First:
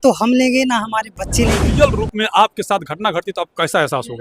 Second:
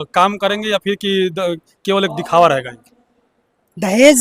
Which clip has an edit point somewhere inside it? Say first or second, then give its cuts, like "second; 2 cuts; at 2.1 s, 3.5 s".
first; 1 cut; at 1.7 s